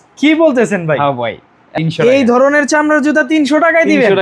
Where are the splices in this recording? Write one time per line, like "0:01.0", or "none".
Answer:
0:01.7